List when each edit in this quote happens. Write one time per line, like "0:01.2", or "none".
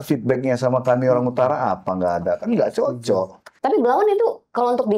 0:03.4